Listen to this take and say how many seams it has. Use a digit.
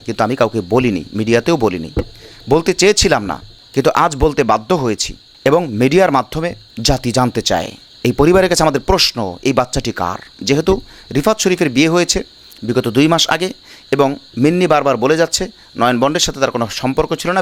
0